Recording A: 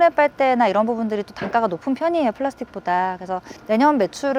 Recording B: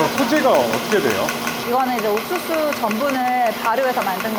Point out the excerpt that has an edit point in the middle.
A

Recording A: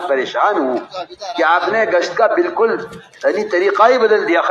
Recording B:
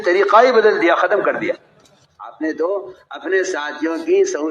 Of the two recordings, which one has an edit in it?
B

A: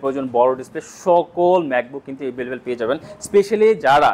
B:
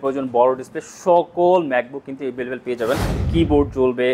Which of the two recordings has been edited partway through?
B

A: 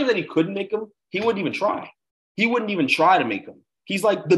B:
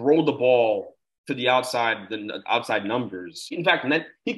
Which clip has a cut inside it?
B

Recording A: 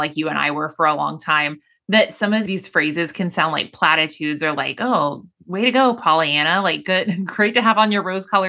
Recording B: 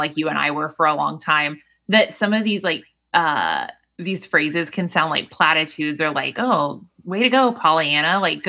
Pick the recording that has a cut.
A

